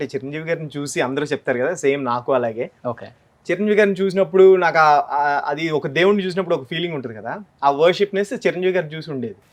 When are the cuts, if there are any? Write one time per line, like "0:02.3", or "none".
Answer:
none